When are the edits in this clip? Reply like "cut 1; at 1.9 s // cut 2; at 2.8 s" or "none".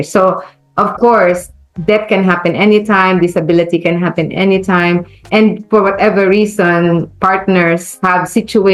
none